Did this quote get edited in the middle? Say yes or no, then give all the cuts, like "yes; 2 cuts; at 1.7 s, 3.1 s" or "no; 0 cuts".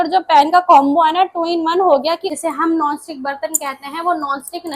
yes; 1 cut; at 2.3 s